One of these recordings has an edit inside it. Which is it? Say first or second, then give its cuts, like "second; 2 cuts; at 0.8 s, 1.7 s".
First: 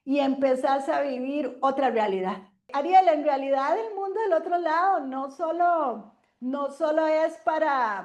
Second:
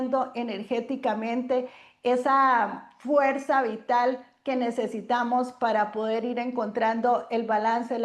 first; 1 cut; at 2.7 s